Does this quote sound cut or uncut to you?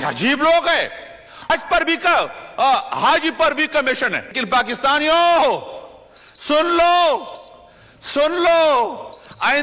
cut